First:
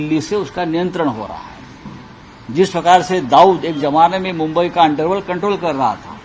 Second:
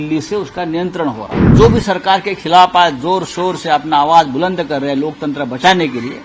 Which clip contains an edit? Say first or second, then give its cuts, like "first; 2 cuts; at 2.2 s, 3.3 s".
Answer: second; 1 cut; at 1.5 s